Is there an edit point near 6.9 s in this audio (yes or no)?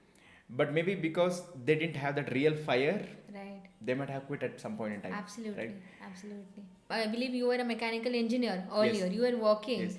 yes